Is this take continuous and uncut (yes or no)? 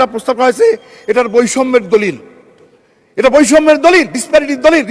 yes